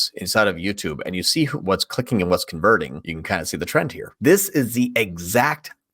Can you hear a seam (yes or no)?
yes